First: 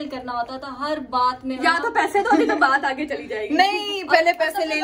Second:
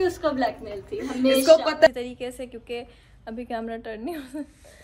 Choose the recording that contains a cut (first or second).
second